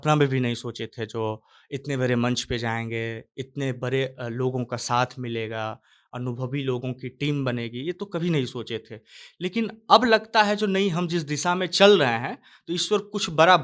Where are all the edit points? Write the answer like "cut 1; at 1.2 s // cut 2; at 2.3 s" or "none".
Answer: none